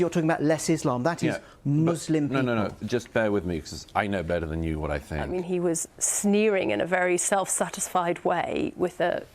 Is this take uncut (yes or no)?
no